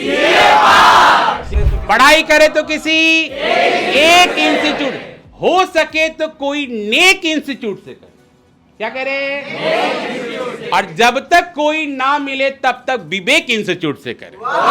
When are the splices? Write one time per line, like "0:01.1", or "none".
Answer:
0:01.5